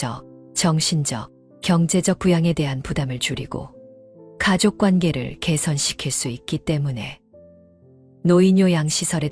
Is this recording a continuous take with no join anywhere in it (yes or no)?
yes